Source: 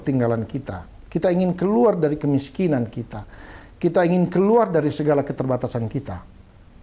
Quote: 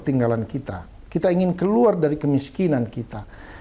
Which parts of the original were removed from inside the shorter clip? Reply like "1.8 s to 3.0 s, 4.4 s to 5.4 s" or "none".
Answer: none